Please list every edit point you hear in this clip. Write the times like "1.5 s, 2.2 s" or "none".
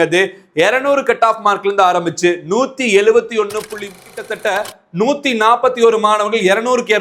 4.0 s